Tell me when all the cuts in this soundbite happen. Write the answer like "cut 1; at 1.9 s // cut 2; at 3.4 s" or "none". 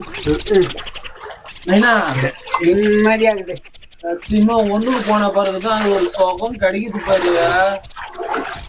none